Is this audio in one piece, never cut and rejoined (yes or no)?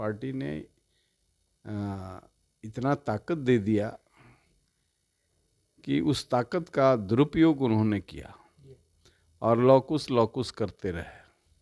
yes